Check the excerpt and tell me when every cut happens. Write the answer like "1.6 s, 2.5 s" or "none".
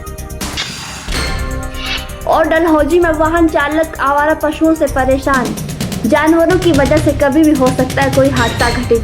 2.2 s